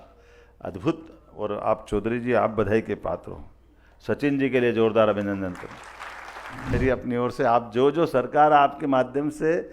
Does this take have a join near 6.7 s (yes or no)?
yes